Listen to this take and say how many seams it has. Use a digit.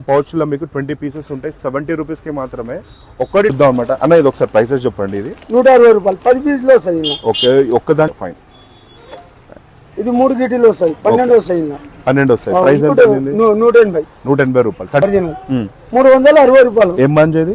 3